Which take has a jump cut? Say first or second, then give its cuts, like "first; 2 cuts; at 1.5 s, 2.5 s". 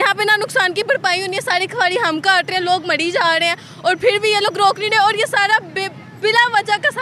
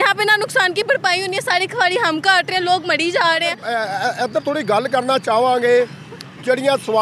second; 1 cut; at 3.7 s